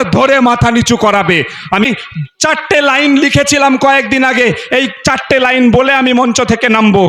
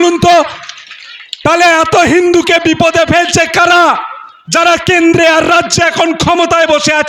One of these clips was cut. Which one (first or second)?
first